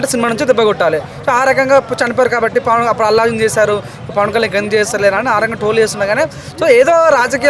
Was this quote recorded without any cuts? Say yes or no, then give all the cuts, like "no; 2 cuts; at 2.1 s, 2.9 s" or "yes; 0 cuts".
yes; 0 cuts